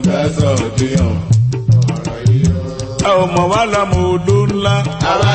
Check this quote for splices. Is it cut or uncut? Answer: uncut